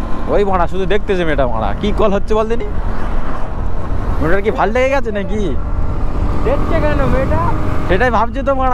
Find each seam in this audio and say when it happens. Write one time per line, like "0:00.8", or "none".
none